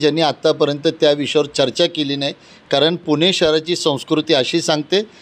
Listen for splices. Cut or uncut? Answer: uncut